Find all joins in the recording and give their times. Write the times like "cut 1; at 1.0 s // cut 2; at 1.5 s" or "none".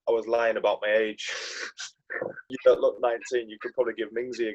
cut 1; at 2.5 s